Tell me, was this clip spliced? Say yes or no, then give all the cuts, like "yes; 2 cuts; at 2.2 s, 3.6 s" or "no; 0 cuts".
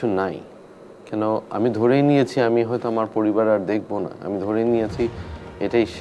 no; 0 cuts